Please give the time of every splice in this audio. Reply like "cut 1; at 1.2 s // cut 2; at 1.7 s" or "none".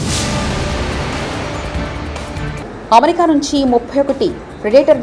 cut 1; at 2.5 s